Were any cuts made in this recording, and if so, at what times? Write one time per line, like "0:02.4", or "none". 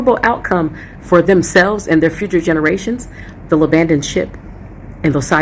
none